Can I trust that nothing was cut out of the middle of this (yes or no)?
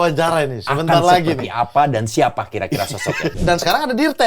no